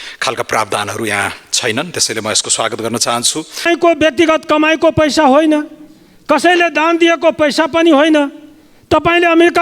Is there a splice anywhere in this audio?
yes; 1 cut; at 3.6 s

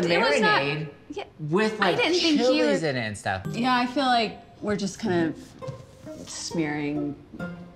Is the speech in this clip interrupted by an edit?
yes; 1 cut; at 3.4 s

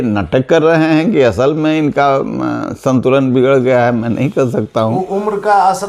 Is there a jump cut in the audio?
no; 0 cuts

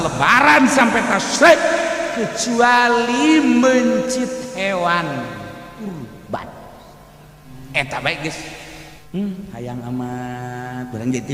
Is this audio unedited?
no; 1 cut; at 8.9 s

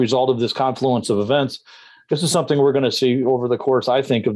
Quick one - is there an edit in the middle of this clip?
no; 0 cuts

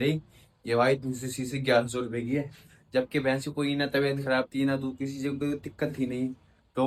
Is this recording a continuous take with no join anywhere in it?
yes; 0 cuts

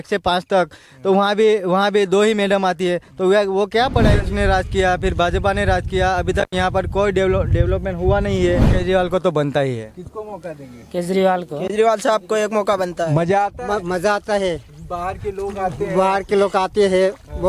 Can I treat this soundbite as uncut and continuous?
no; 3 cuts; at 4.2 s, 8.8 s, 13.0 s

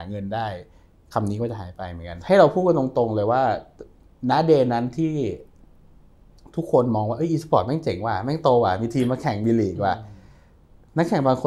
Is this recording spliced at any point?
yes; 1 cut; at 2.1 s

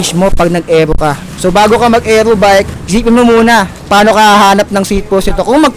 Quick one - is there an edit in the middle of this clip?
yes; 3 cuts; at 1.3 s, 2.8 s, 3.8 s

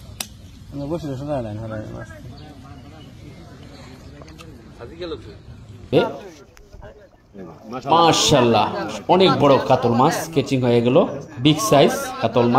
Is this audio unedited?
no; 1 cut; at 5.9 s

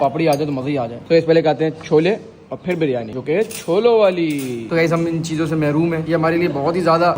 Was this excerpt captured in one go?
yes; 0 cuts

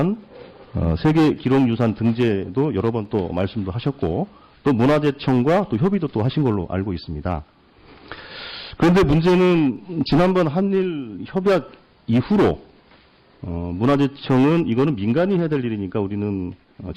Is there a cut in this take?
yes; 1 cut; at 11.7 s

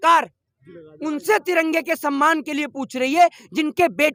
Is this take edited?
no; 0 cuts

